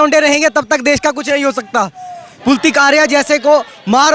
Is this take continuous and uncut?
yes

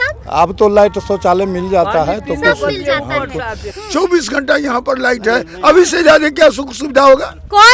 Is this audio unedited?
no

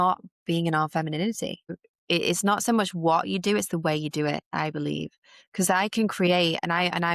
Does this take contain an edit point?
yes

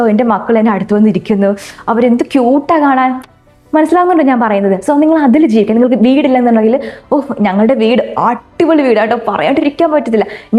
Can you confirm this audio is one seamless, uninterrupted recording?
yes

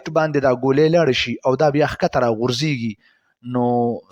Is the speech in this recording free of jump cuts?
yes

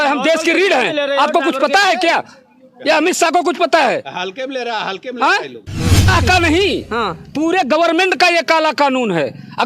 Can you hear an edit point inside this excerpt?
yes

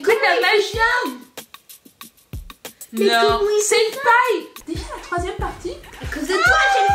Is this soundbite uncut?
no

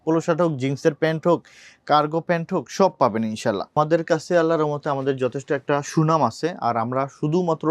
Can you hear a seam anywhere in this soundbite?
yes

